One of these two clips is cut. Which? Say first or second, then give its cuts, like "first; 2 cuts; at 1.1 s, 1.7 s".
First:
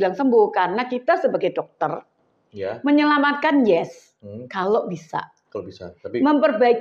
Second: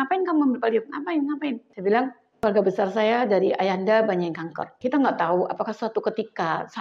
second; 3 cuts; at 1.7 s, 2.2 s, 4.6 s